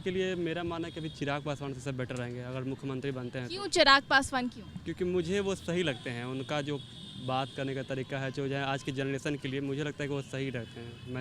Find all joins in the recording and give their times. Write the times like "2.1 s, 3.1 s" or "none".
none

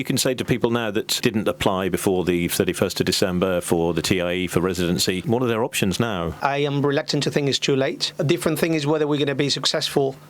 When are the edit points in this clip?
1.1 s, 5.2 s, 6.4 s, 8.1 s

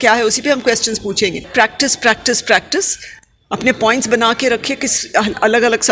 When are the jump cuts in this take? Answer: 1.5 s

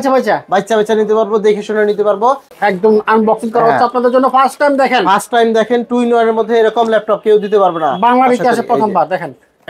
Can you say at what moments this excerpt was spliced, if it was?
2.5 s

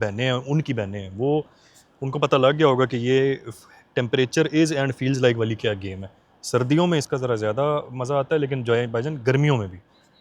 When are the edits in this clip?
none

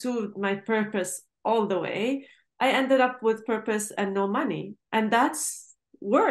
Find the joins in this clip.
none

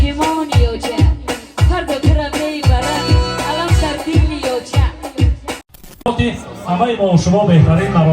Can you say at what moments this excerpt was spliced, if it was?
6.0 s

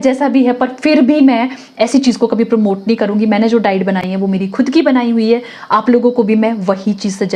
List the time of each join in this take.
none

